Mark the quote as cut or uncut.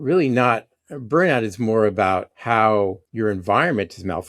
cut